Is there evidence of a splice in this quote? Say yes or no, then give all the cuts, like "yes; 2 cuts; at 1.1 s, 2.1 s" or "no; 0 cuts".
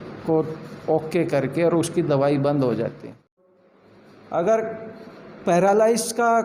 yes; 1 cut; at 3.4 s